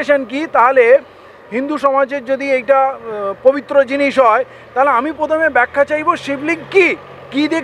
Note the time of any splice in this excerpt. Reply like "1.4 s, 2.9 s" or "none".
none